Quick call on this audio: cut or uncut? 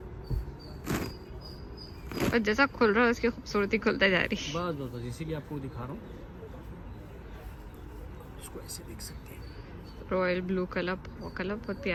uncut